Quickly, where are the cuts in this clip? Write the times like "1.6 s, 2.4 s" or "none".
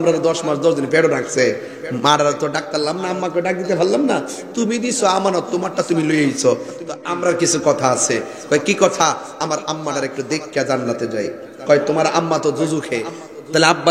6.7 s